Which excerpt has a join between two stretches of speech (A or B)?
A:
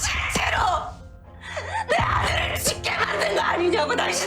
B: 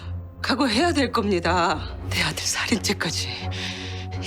B